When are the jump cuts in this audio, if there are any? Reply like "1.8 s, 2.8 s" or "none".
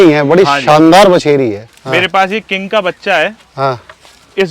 1.7 s